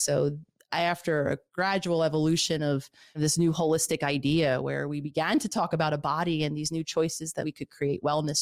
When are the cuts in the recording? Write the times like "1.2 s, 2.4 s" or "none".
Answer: 3.0 s, 7.4 s